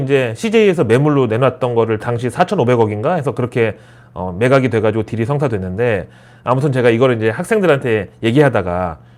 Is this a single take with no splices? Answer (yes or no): yes